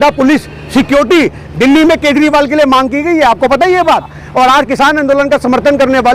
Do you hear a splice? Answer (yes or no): yes